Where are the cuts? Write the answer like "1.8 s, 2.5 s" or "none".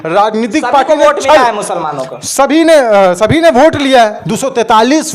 4.2 s